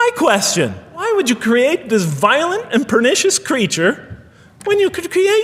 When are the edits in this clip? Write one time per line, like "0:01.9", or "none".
0:01.0